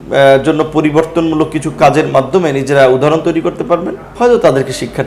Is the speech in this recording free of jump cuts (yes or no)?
no